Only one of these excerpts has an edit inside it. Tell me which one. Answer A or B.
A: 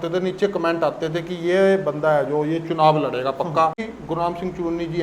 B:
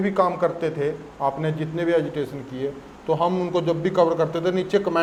A